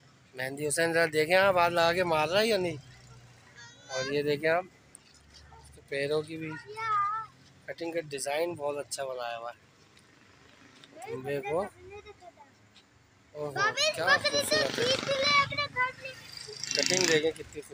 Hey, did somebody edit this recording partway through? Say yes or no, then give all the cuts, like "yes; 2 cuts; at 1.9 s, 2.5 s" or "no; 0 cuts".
no; 0 cuts